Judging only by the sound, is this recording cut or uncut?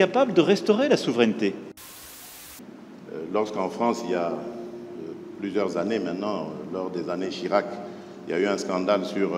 cut